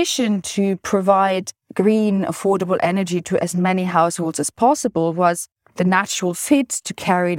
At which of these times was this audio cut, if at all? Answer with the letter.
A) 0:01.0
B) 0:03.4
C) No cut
C